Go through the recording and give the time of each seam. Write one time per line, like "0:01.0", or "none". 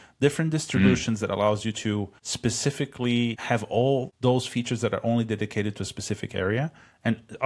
0:02.2
0:04.1